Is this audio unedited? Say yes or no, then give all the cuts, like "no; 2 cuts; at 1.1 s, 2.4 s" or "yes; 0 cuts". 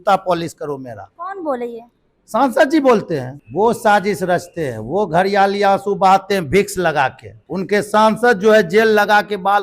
no; 2 cuts; at 3.4 s, 7.4 s